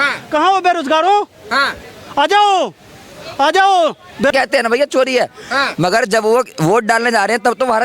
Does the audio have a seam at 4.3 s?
yes; 1 cut; at 4.3 s

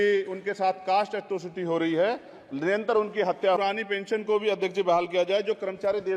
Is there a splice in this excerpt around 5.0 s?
no; 1 cut; at 3.6 s

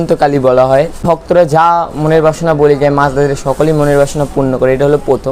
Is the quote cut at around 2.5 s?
no; 1 cut; at 1.2 s

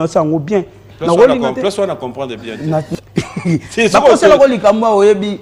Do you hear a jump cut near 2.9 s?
yes; 1 cut; at 2.9 s

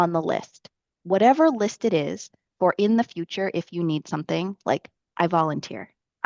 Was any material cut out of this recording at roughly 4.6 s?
no; 0 cuts

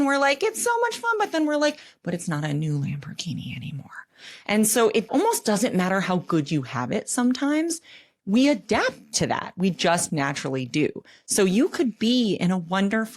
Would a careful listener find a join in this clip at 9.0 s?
no; 1 cut; at 5.1 s

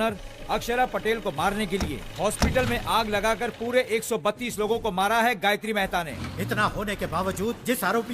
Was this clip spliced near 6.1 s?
yes; 1 cut; at 6.1 s

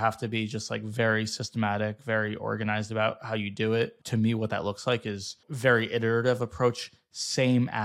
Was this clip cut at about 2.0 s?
no; 2 cuts; at 4.0 s, 5.4 s

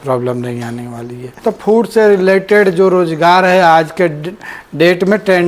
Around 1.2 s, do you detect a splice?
yes; 1 cut; at 1.2 s

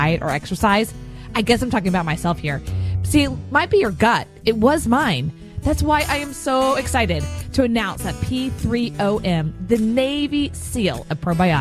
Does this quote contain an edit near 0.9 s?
no; 0 cuts

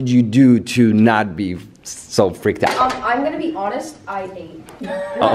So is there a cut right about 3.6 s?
no; 0 cuts

